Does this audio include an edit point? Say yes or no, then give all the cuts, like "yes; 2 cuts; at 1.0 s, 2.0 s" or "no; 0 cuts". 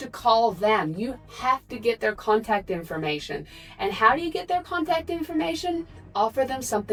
no; 0 cuts